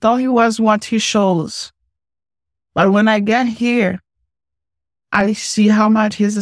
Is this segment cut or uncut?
uncut